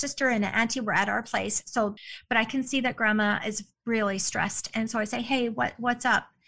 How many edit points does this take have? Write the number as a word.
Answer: one